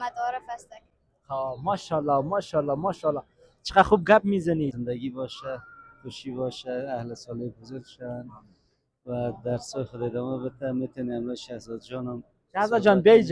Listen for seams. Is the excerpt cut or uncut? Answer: cut